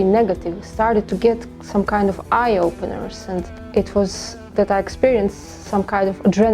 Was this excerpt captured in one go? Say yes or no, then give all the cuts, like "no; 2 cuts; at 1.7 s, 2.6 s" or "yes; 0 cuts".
no; 1 cut; at 3.6 s